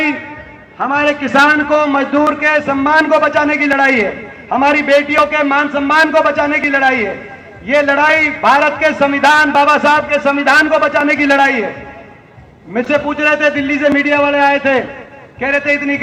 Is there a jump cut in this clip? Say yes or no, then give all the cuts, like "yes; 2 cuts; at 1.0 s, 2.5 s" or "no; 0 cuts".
no; 0 cuts